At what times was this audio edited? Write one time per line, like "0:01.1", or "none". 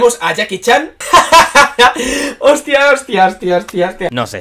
none